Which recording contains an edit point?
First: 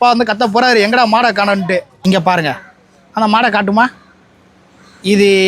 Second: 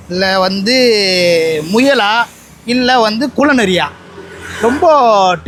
first; 1 cut; at 2.0 s

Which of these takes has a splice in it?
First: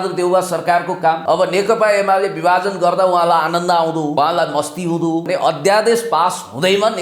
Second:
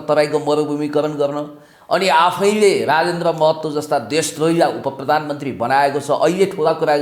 first; 3 cuts; at 1.2 s, 4.2 s, 5.3 s

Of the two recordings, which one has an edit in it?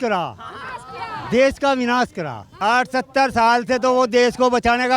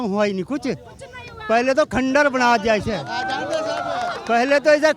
first; 1 cut; at 2.5 s

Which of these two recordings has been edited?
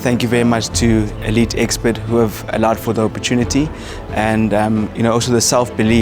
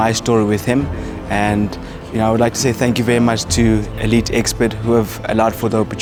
first; 1 cut; at 4.9 s

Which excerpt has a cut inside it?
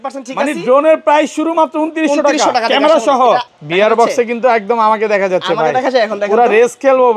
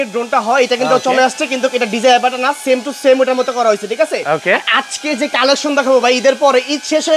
first; 1 cut; at 3.5 s

